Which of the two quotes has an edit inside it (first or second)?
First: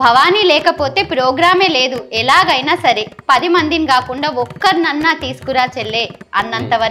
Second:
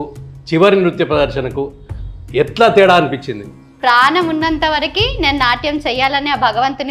second